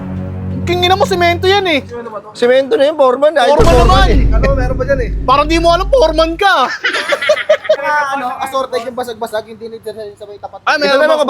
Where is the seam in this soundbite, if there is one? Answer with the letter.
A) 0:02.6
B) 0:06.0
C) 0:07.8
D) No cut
C